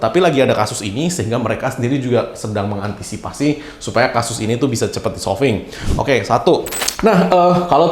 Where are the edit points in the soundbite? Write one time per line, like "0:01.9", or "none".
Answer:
0:06.8